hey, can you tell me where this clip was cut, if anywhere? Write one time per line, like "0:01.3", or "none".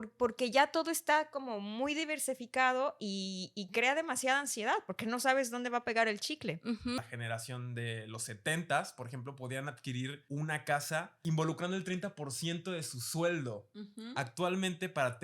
0:07.0
0:10.2
0:11.1